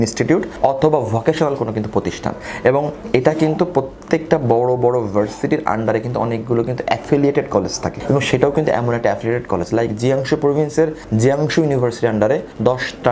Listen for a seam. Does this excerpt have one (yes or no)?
no